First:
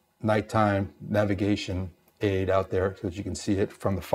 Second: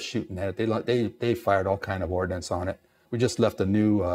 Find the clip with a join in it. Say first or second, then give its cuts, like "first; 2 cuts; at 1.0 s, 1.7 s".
second; 1 cut; at 3.0 s